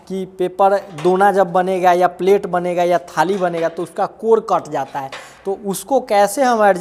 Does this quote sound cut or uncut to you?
uncut